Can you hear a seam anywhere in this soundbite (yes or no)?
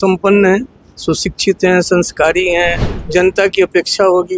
yes